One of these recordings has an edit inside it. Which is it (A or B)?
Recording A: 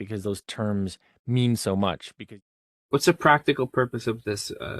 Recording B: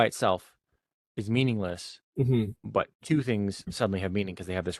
A